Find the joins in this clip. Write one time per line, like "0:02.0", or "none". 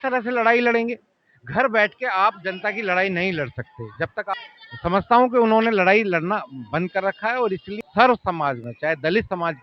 0:04.3
0:07.7